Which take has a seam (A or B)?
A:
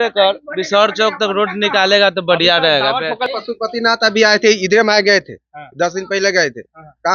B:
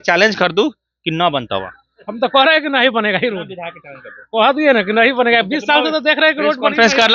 A